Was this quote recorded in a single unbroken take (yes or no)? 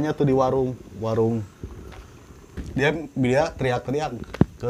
no